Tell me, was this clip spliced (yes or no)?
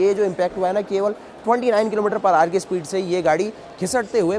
no